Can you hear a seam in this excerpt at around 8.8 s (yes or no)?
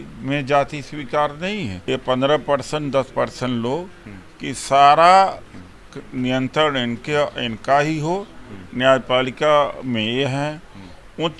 no